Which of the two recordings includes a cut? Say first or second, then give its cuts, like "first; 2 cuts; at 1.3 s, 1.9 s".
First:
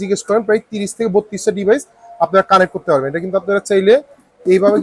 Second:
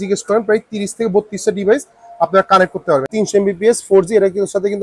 second; 1 cut; at 3.1 s